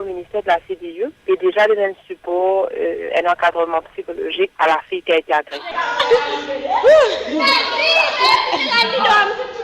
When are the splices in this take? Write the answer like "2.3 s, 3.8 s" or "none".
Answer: 3.1 s

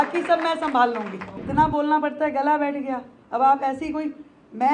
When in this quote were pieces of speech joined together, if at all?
1.4 s

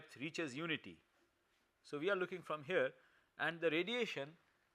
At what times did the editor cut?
3.6 s

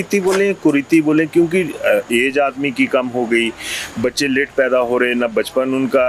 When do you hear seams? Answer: none

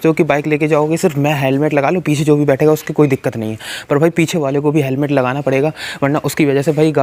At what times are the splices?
none

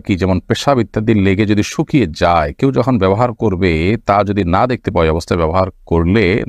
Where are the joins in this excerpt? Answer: none

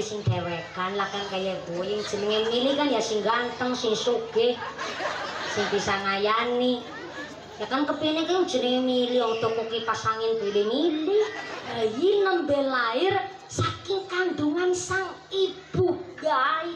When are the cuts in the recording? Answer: 11.7 s

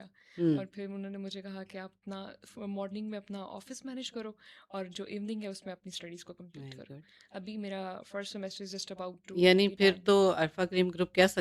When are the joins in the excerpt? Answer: none

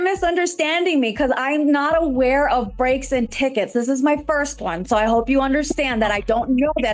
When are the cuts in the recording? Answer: none

